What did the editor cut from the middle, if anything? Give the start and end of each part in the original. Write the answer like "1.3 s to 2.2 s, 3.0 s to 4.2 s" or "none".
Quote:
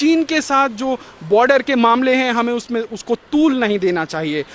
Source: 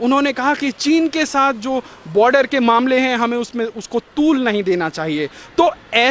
none